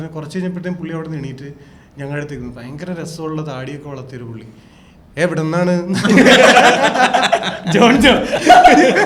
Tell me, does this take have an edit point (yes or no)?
no